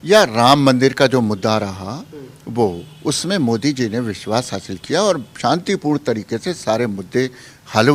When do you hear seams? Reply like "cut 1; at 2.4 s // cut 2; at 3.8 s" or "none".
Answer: none